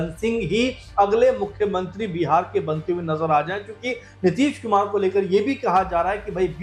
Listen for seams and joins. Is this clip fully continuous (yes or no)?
yes